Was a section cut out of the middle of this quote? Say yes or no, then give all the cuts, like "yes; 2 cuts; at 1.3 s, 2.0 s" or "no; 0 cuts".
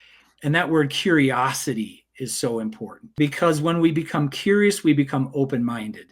yes; 1 cut; at 3.0 s